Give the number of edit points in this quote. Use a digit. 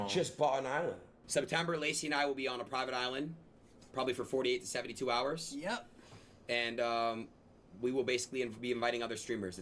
1